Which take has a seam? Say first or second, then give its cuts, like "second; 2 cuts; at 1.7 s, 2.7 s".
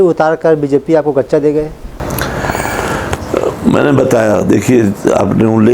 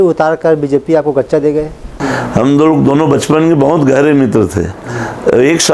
second; 1 cut; at 1.9 s